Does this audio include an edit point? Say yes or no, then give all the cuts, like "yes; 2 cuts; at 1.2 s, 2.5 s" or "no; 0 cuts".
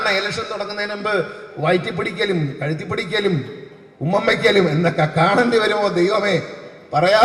no; 0 cuts